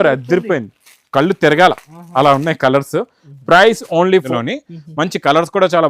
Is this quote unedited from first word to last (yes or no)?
no